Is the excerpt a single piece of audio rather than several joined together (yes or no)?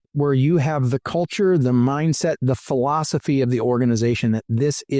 yes